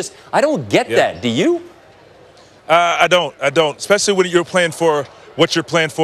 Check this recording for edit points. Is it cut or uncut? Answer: cut